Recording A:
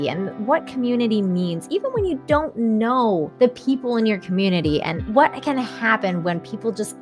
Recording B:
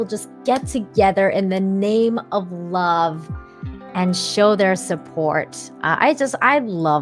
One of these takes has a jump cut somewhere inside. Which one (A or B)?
A